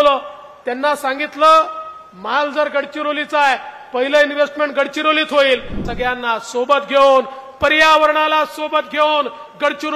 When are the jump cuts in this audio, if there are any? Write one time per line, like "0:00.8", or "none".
0:05.8